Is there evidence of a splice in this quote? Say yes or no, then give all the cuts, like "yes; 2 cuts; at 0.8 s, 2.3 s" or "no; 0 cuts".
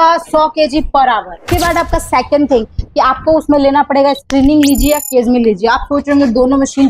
yes; 1 cut; at 1.4 s